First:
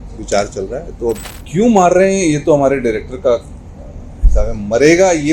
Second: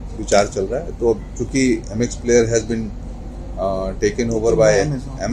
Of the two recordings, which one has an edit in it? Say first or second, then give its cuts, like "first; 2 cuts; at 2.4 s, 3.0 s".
first; 1 cut; at 1.3 s